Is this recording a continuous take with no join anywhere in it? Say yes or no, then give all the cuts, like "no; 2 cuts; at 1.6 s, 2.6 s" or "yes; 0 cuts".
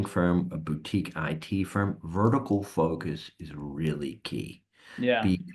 yes; 0 cuts